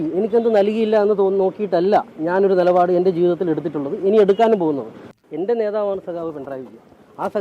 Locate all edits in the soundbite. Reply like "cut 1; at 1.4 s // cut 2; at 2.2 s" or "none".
cut 1; at 5.2 s